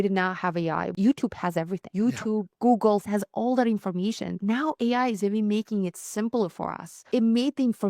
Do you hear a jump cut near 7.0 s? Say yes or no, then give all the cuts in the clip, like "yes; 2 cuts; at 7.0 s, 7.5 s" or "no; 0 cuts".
yes; 5 cuts; at 0.9 s, 1.8 s, 3.1 s, 4.4 s, 7.0 s